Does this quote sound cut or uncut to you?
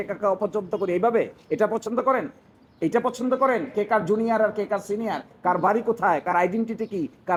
uncut